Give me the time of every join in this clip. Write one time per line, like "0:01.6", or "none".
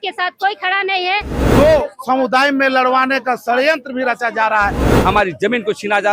0:01.4
0:04.9